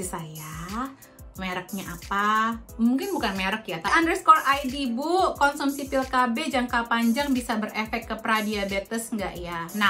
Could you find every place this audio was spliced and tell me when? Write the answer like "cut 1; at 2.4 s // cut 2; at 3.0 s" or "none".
cut 1; at 3.9 s